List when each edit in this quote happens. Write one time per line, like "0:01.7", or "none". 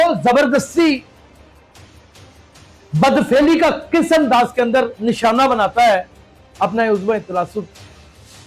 0:01.0
0:02.8

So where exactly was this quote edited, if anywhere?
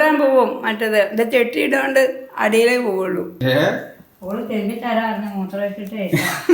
0:03.3

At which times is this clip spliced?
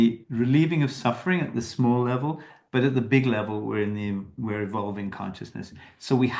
none

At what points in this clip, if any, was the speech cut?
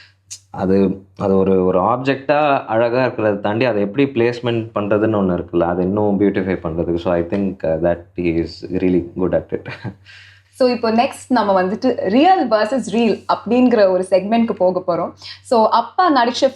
none

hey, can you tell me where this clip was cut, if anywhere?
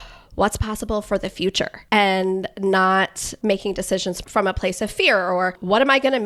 0:01.8
0:03.3
0:04.2

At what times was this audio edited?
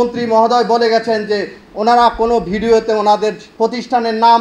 0:03.4

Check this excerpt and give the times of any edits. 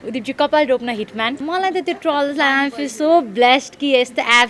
0:01.4

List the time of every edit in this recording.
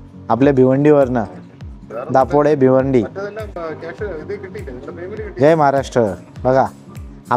none

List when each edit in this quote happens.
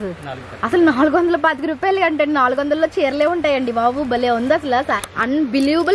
0:05.0

